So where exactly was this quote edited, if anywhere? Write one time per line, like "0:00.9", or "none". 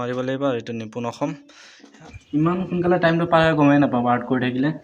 0:02.1